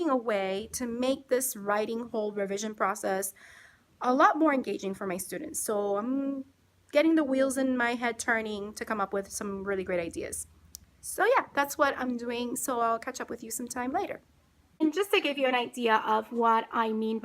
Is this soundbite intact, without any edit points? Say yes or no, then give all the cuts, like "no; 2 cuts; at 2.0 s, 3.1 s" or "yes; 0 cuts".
yes; 0 cuts